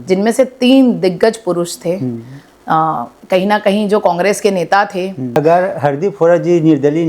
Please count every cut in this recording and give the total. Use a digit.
1